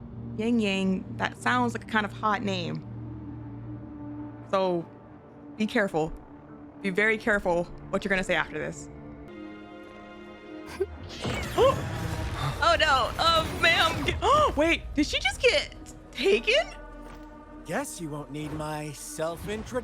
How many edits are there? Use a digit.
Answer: 1